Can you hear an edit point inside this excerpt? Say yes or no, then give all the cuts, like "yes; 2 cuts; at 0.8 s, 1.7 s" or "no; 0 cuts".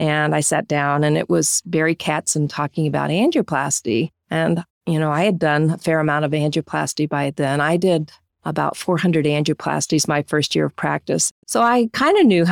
yes; 2 cuts; at 4.2 s, 11.3 s